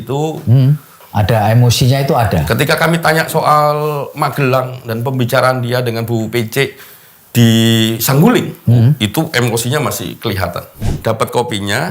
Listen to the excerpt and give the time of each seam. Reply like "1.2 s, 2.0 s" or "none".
1.0 s, 10.9 s